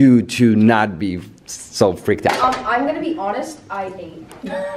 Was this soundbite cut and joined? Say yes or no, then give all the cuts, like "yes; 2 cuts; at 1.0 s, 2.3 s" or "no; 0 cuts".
no; 0 cuts